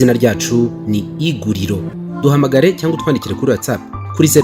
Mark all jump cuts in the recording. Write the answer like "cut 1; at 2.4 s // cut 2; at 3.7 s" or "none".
cut 1; at 1.9 s